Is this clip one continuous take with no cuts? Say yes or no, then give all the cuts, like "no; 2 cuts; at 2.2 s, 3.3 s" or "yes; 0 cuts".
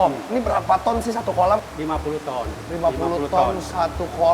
no; 1 cut; at 1.6 s